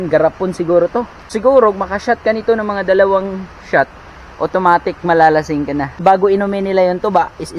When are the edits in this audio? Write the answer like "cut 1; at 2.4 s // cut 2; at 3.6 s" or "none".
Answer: cut 1; at 1.2 s // cut 2; at 5.9 s